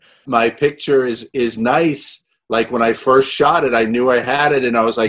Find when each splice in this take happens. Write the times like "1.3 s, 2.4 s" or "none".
none